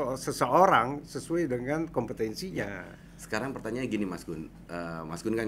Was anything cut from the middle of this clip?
no; 0 cuts

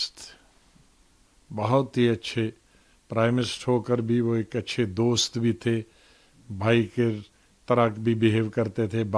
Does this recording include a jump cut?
no; 0 cuts

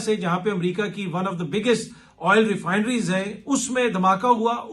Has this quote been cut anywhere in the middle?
no; 0 cuts

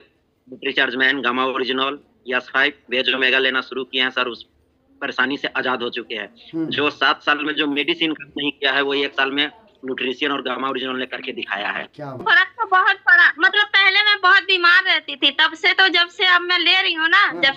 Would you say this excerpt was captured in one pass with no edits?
no; 1 cut; at 12.2 s

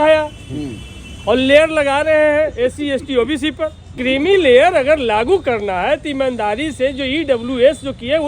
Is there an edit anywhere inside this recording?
yes; 1 cut; at 3.9 s

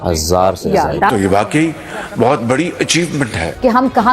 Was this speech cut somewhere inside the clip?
yes; 1 cut; at 1.1 s

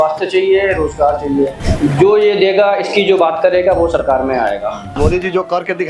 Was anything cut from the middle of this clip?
yes; 2 cuts; at 1.6 s, 4.9 s

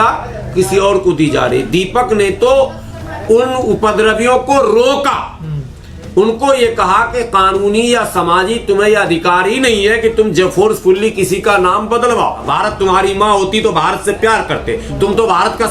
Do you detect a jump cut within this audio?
yes; 1 cut; at 12.4 s

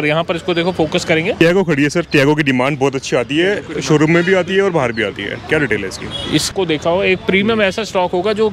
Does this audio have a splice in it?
yes; 2 cuts; at 1.4 s, 6.5 s

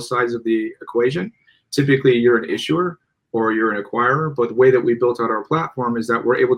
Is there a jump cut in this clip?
no; 0 cuts

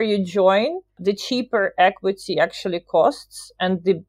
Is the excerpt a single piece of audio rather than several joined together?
no; 1 cut; at 1.0 s

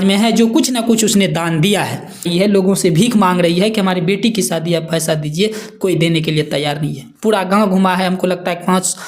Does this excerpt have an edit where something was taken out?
yes; 1 cut; at 2.3 s

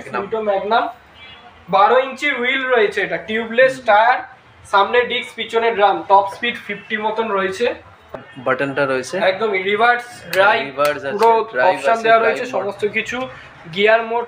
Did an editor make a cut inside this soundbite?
yes; 1 cut; at 8.1 s

